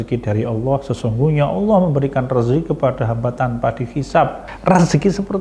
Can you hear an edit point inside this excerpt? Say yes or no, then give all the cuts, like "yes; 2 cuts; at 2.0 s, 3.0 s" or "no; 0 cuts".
yes; 1 cut; at 4.5 s